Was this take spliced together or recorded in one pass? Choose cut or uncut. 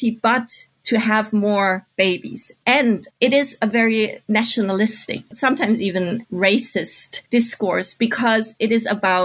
cut